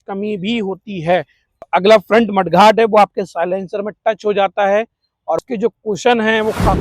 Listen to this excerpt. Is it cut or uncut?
cut